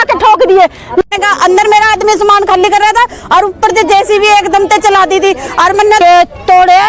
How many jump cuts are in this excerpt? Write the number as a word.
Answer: two